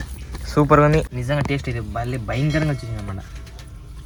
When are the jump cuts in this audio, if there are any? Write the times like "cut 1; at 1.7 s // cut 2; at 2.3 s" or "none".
none